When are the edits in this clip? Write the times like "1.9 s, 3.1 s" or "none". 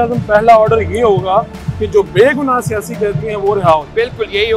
none